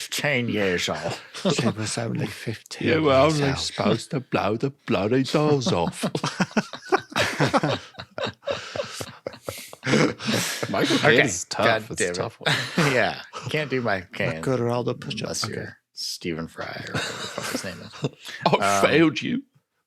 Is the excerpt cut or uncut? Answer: uncut